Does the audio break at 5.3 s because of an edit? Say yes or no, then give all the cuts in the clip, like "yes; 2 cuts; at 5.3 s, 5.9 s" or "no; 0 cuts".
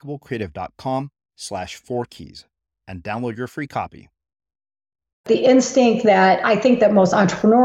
yes; 1 cut; at 5.3 s